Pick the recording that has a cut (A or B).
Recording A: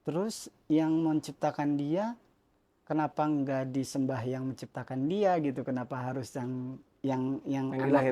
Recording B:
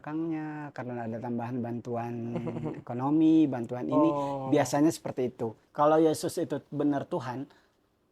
B